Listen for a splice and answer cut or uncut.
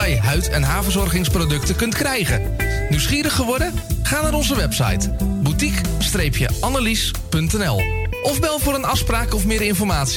uncut